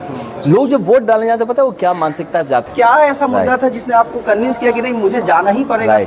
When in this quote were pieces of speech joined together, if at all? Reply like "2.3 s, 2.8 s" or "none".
2.7 s